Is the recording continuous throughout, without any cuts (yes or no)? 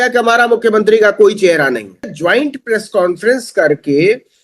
no